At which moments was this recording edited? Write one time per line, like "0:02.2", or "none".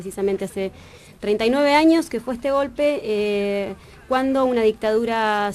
none